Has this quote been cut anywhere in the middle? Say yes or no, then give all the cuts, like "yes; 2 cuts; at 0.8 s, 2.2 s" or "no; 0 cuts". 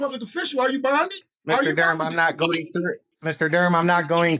yes; 2 cuts; at 1.3 s, 3.1 s